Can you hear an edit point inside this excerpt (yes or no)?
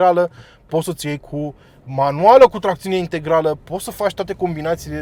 no